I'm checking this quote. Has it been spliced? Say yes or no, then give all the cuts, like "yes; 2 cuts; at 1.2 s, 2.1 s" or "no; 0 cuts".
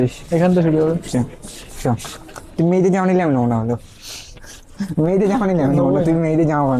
no; 0 cuts